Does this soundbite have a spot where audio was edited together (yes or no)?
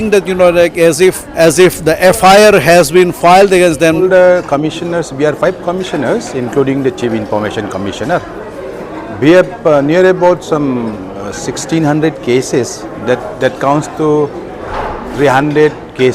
yes